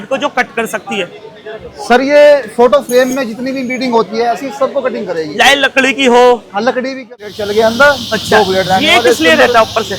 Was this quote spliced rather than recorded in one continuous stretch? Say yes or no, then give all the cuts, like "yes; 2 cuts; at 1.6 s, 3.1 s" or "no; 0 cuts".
yes; 1 cut; at 7.1 s